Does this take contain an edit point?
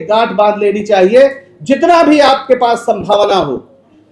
no; 0 cuts

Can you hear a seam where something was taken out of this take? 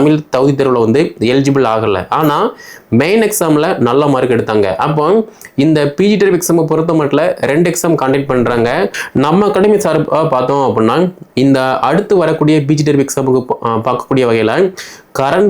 yes; 1 cut; at 9.0 s

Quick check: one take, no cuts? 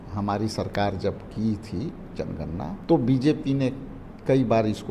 no; 1 cut; at 2.8 s

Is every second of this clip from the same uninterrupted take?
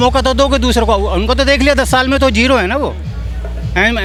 yes; 0 cuts

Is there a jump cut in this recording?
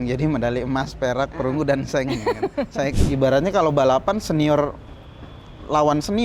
yes; 1 cut; at 2.9 s

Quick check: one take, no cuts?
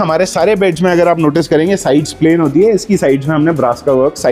yes; 0 cuts

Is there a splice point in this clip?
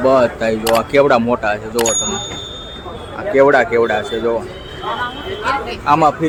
no; 0 cuts

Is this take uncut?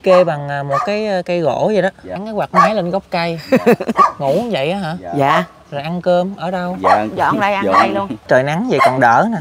no; 2 cuts; at 2.1 s, 8.2 s

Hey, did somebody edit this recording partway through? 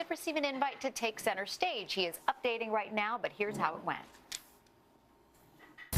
yes; 1 cut; at 4.8 s

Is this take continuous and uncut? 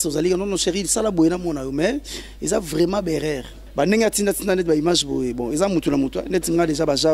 no; 1 cut; at 3.6 s

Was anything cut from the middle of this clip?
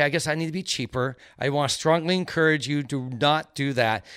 no; 0 cuts

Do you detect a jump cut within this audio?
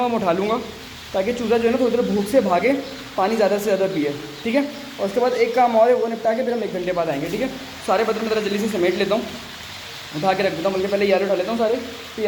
no; 0 cuts

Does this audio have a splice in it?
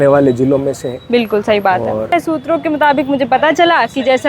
yes; 1 cut; at 2.1 s

